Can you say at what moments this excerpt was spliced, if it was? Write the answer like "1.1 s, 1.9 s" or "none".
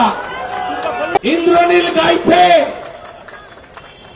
1.1 s